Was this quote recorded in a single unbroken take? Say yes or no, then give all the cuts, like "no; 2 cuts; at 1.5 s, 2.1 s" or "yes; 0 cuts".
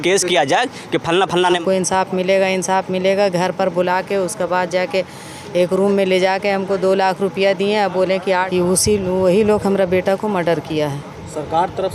no; 2 cuts; at 1.4 s, 8.2 s